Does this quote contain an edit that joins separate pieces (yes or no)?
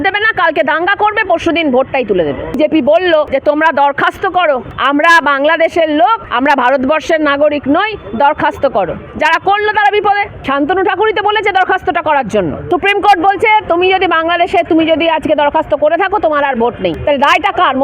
yes